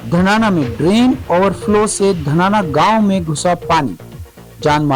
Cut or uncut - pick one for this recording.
uncut